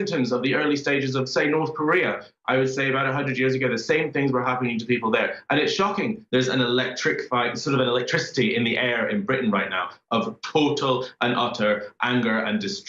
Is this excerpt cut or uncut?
cut